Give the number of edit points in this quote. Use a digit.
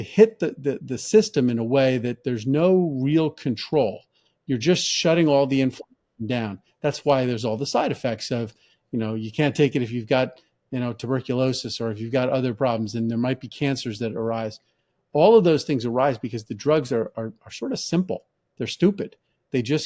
0